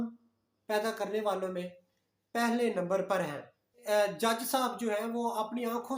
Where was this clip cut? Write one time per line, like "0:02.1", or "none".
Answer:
0:03.8